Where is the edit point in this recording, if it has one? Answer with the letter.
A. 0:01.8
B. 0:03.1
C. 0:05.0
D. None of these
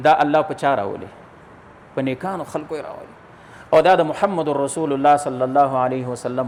D